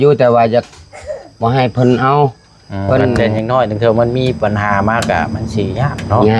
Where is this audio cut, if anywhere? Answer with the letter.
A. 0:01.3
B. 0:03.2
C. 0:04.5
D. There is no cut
B